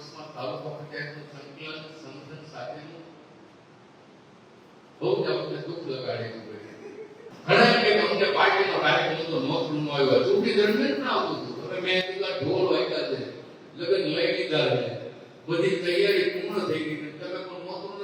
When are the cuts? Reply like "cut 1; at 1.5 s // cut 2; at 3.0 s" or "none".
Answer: cut 1; at 7.3 s